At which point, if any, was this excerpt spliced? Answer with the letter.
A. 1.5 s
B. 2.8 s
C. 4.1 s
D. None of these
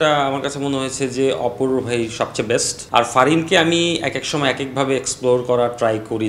B